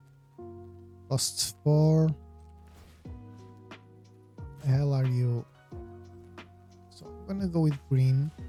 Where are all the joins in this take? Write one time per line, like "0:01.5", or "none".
none